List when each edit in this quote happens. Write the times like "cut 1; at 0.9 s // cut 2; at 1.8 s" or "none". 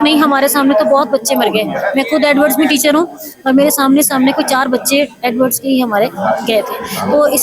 none